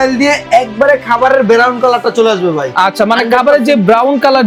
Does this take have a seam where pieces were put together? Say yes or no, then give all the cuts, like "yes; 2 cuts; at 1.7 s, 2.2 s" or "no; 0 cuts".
no; 0 cuts